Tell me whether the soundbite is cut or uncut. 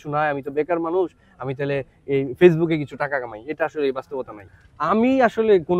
cut